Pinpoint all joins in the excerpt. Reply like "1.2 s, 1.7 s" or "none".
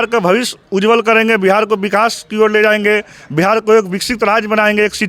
none